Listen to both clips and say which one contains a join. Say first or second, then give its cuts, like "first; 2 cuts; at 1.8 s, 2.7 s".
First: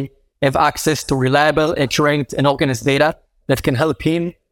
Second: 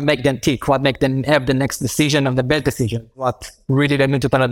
second; 1 cut; at 3.3 s